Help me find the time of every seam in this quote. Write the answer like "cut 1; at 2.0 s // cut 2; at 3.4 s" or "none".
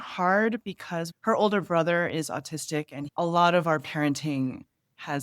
cut 1; at 1.0 s